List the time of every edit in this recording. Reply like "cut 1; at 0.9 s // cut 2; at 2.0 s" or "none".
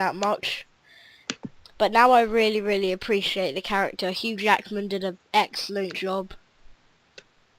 cut 1; at 1.9 s